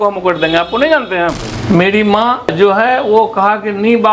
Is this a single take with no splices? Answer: no; 1 cut; at 1.5 s

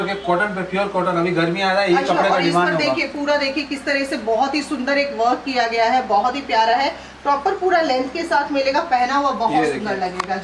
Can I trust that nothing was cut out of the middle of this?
yes; 0 cuts

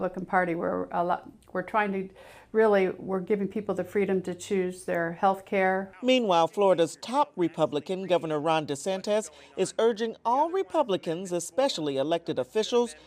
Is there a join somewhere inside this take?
no; 0 cuts

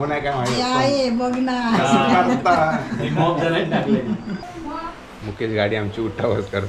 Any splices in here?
yes; 1 cut; at 4.3 s

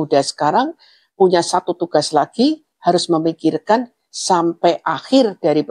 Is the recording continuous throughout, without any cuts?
yes; 0 cuts

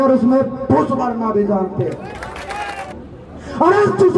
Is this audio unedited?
no; 1 cut; at 2.8 s

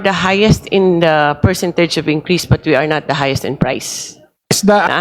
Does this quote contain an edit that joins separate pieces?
no; 0 cuts

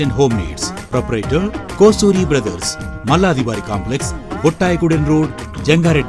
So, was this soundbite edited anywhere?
no; 0 cuts

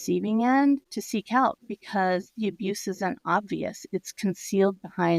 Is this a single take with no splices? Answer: no; 1 cut; at 0.9 s

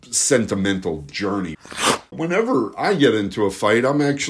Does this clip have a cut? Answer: yes; 1 cut; at 1.7 s

